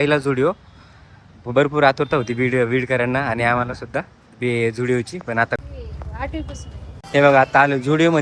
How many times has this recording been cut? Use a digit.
1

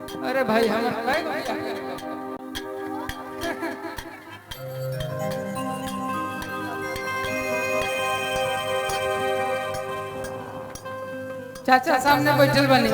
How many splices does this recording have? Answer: 0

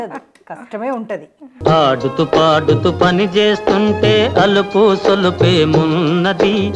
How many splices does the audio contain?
0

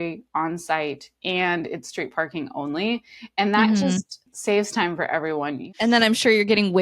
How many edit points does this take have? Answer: 2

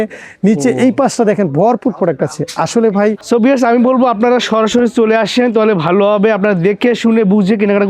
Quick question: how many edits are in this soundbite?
1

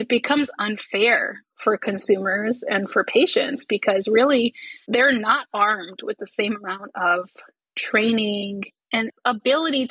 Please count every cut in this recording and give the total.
0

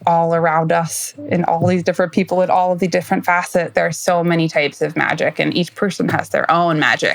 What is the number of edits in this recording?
1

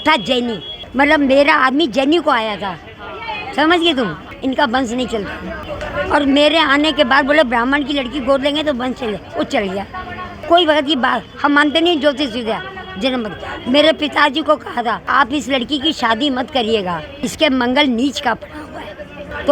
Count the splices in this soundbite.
0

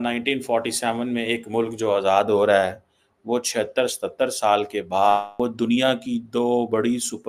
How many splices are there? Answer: 1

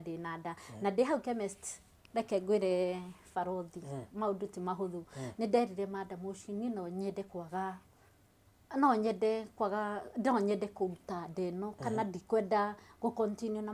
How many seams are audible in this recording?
0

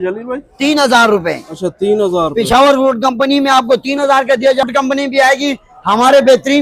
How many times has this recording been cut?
1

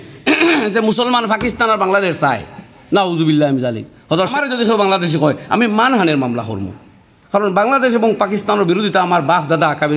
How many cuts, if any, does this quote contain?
1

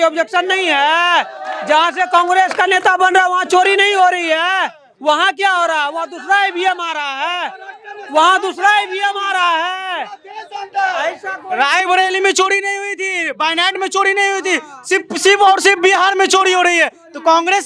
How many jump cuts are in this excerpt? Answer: 0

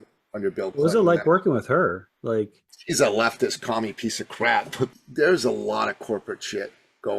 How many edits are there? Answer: 1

